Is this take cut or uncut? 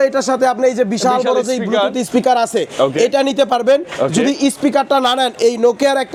uncut